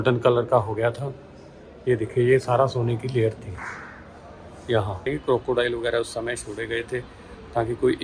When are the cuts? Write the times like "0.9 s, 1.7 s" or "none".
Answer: 5.0 s

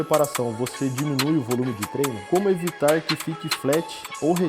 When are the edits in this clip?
2.2 s

